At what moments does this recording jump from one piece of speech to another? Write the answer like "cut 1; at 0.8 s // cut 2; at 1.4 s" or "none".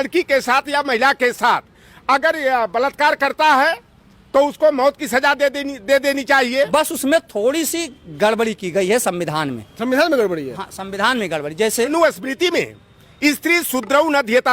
cut 1; at 6.7 s // cut 2; at 11.9 s